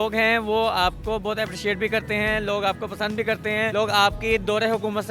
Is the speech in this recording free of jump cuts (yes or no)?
yes